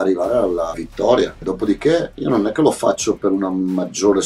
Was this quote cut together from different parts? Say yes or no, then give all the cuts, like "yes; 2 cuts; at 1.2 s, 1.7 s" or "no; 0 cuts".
yes; 2 cuts; at 0.9 s, 2.1 s